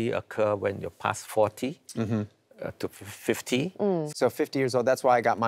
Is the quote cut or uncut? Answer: cut